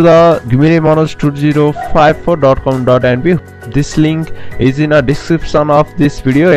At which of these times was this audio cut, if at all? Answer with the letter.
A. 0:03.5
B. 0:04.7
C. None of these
C